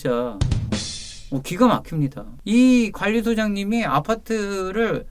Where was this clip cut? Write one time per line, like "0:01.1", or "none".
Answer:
0:02.3